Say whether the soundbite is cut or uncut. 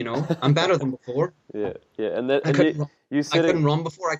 uncut